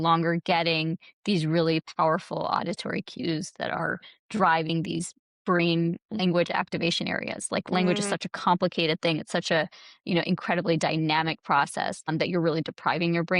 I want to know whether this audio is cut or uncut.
cut